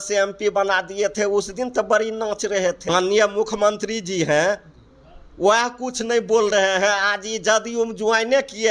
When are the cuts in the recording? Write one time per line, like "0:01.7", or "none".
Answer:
0:02.8